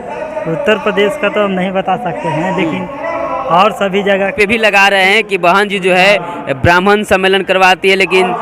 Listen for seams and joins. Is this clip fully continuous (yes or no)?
no